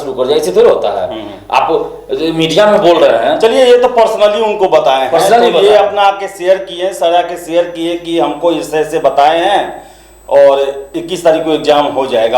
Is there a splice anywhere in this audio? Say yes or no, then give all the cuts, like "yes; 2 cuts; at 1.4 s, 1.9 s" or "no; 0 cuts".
no; 0 cuts